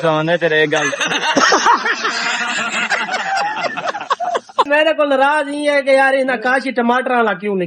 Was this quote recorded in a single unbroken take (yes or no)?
no